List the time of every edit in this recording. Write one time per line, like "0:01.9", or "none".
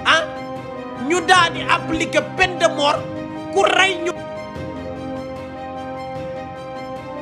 0:04.5

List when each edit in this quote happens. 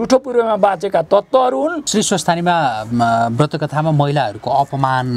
0:01.9

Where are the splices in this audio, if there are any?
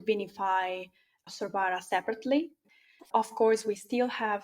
0:02.9

